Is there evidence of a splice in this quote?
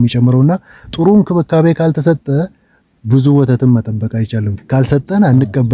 yes; 1 cut; at 4.6 s

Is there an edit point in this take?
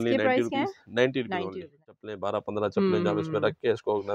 yes; 1 cut; at 2.1 s

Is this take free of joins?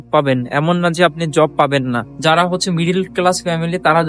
no; 1 cut; at 2.1 s

